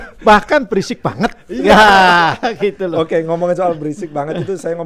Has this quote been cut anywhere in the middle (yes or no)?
no